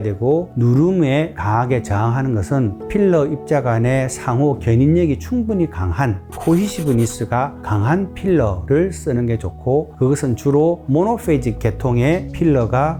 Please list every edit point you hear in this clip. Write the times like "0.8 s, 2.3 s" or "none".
none